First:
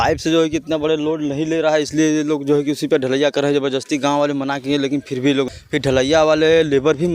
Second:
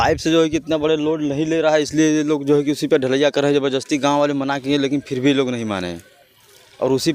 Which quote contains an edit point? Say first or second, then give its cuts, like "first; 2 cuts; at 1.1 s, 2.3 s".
first; 1 cut; at 5.6 s